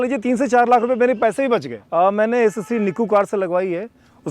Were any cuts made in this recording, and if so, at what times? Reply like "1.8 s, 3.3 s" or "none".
1.8 s